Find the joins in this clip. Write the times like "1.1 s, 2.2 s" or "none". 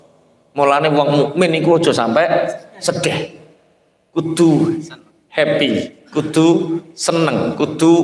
none